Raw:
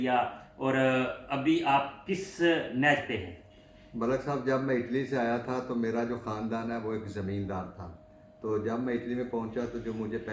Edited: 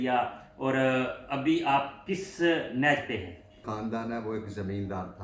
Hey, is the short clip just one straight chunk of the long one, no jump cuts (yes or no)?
no